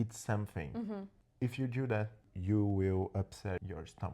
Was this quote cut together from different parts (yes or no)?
yes